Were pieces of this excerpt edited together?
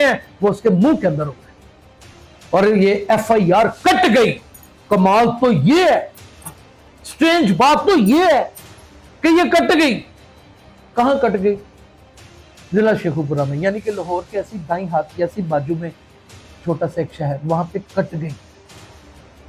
no; 0 cuts

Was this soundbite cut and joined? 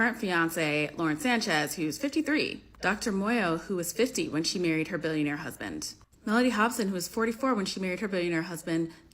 no; 0 cuts

